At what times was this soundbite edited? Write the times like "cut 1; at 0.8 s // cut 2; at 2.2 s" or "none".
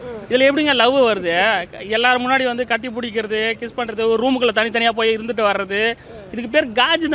none